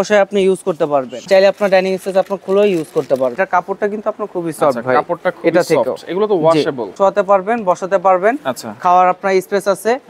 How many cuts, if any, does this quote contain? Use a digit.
3